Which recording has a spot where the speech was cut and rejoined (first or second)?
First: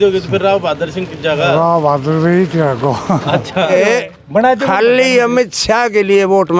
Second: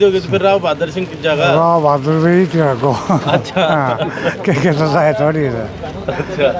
first